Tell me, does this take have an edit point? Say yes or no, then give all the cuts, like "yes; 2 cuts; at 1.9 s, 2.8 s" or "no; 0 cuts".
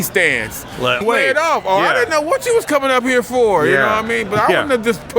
yes; 1 cut; at 1.0 s